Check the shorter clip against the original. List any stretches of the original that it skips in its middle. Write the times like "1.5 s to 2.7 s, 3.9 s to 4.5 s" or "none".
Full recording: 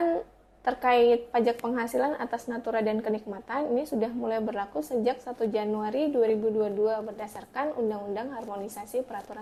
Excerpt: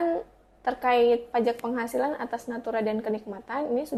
none